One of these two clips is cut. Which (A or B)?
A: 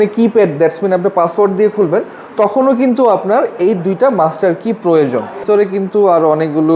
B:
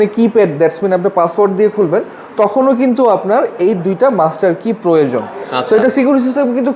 A